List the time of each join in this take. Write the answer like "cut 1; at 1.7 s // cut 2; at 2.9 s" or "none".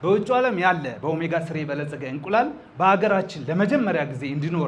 none